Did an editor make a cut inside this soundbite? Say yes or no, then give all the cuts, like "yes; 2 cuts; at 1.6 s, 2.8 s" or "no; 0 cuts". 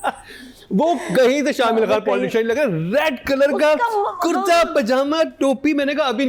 no; 0 cuts